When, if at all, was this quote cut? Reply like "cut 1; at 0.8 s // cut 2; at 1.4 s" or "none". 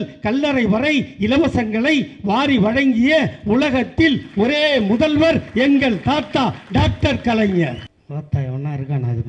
cut 1; at 7.9 s